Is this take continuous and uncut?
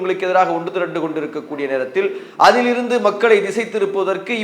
no; 1 cut; at 2.2 s

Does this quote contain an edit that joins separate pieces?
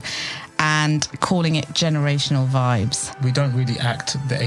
yes; 1 cut; at 3.1 s

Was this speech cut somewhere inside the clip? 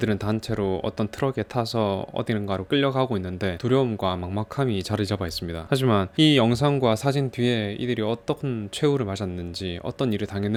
no; 0 cuts

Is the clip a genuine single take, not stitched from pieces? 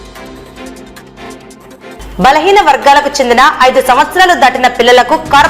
no; 1 cut; at 1.6 s

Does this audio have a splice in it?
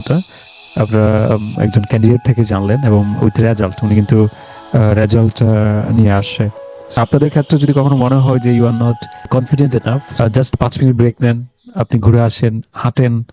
yes; 3 cuts; at 7.0 s, 9.3 s, 10.2 s

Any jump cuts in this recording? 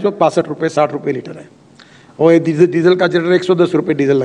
no; 0 cuts

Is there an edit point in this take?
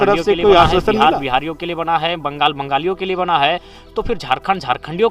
yes; 1 cut; at 1.0 s

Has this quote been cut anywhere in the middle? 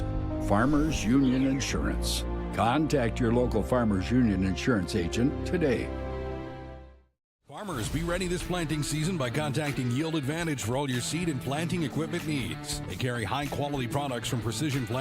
yes; 1 cut; at 7.6 s

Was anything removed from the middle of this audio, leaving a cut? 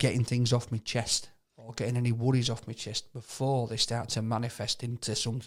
no; 0 cuts

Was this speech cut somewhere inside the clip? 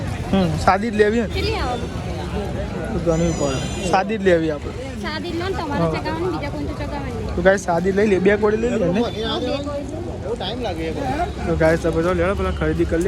no; 0 cuts

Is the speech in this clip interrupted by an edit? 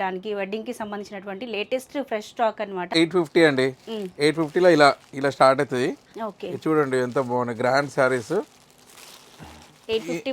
yes; 1 cut; at 2.9 s

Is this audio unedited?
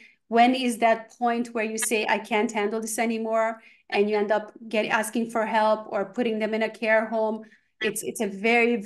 yes; 0 cuts

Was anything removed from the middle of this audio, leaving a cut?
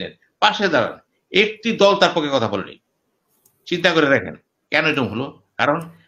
no; 0 cuts

